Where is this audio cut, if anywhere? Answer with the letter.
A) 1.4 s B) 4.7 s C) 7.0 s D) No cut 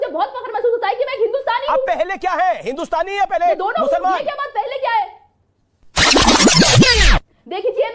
D